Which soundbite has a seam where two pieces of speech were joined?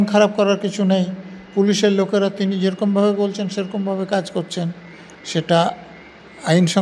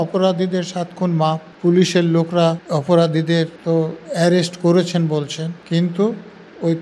second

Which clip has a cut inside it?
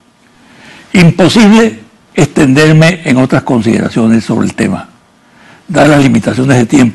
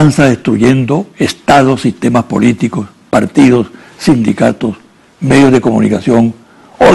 first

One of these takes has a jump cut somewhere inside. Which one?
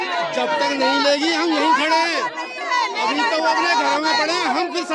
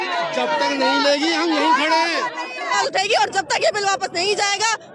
second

